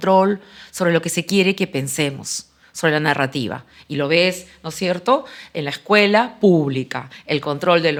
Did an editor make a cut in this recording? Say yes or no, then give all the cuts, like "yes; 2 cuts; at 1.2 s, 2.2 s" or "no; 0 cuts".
no; 0 cuts